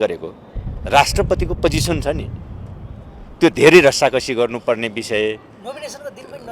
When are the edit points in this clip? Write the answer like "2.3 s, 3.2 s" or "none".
none

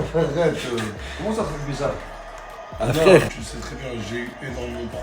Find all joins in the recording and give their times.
3.3 s

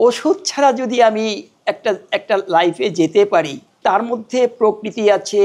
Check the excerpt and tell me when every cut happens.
3.6 s

